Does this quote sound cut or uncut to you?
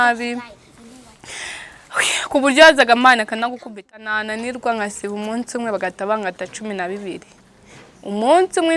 cut